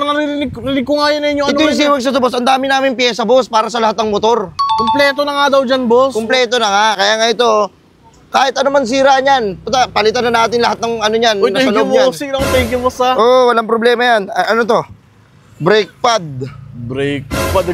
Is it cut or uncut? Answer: uncut